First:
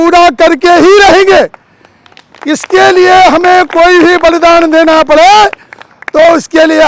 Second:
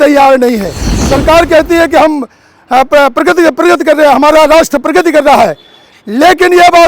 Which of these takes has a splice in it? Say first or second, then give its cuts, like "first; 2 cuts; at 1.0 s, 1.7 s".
second; 1 cut; at 1.0 s